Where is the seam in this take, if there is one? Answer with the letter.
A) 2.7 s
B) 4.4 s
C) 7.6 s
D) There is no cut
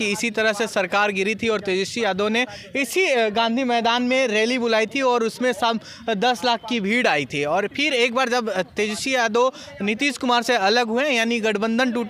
D